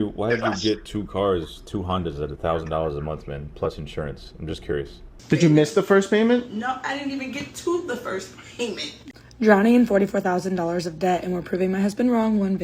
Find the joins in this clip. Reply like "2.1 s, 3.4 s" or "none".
5.1 s, 8.9 s